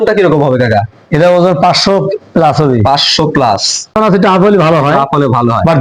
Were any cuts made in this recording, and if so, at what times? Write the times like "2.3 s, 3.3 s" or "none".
4.0 s